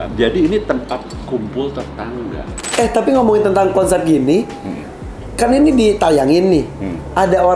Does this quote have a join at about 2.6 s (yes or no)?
yes